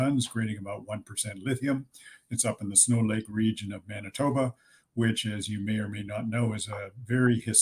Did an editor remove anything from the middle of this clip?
no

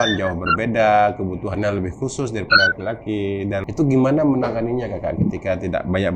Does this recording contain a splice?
yes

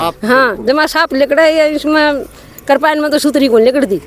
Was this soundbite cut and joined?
no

